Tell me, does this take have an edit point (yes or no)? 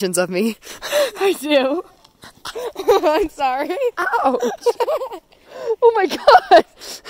no